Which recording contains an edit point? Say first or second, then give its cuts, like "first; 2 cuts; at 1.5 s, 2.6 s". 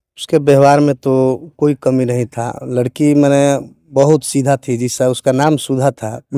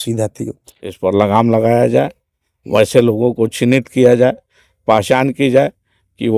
second; 1 cut; at 1.0 s